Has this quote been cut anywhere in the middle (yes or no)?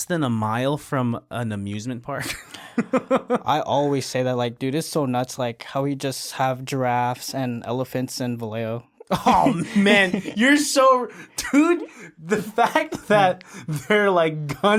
no